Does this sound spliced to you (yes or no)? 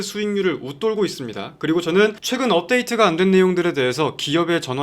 yes